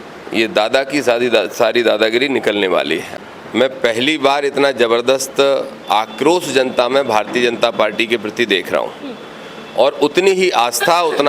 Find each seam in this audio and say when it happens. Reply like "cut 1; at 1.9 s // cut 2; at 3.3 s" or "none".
cut 1; at 3.1 s

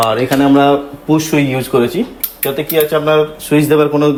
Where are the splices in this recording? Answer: none

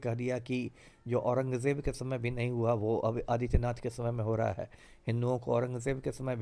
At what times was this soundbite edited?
none

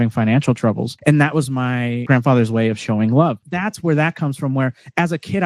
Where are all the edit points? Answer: cut 1; at 0.9 s // cut 2; at 2.0 s // cut 3; at 3.5 s

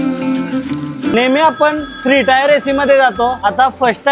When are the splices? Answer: cut 1; at 1.1 s

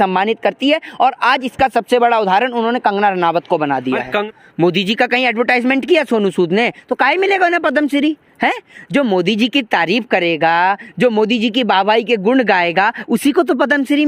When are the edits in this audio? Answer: cut 1; at 4.2 s

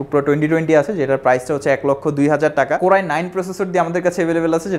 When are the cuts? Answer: cut 1; at 2.8 s

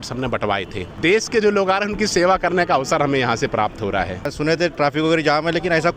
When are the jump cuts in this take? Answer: cut 1; at 0.9 s // cut 2; at 4.3 s

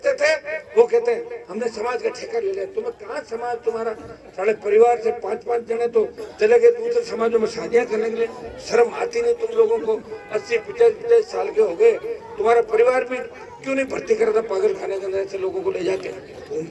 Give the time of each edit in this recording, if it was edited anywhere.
none

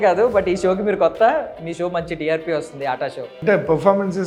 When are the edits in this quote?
cut 1; at 3.3 s

